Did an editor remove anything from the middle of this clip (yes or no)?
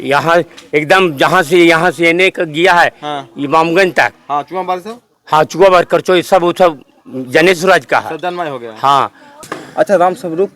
yes